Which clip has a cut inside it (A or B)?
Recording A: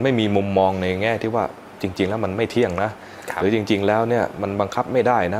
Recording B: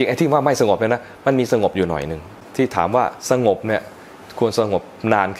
B